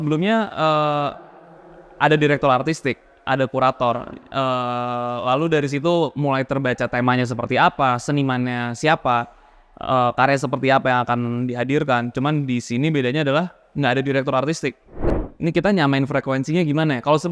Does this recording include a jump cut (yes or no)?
yes